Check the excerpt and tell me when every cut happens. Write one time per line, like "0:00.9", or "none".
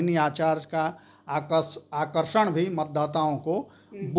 none